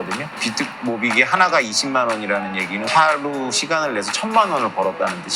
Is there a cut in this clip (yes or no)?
yes